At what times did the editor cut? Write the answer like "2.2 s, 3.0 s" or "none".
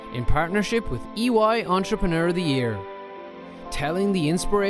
none